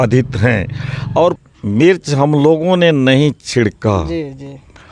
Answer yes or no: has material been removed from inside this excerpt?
yes